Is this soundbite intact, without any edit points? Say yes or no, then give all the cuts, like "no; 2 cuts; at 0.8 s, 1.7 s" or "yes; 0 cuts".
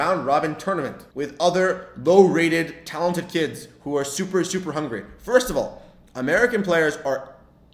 no; 1 cut; at 1.0 s